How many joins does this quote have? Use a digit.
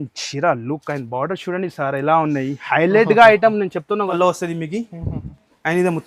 1